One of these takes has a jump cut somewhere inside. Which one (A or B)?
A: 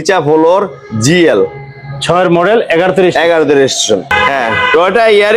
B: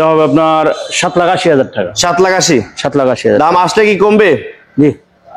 A